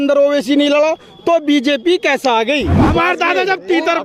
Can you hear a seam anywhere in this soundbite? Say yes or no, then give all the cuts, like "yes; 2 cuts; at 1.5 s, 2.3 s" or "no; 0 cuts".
yes; 1 cut; at 2.8 s